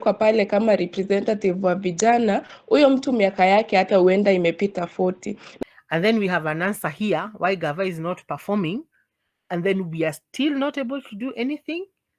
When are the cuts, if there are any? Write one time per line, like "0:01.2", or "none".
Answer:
0:05.4